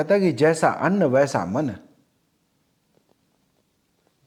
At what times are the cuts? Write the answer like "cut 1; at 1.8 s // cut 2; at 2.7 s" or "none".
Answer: none